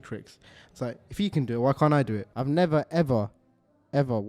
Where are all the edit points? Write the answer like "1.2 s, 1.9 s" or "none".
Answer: 2.3 s